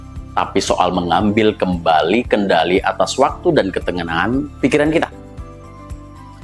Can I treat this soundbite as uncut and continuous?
yes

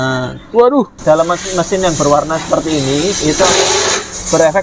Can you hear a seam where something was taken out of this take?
yes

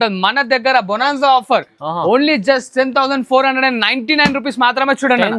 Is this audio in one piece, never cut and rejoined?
yes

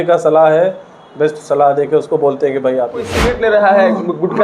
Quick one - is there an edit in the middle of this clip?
yes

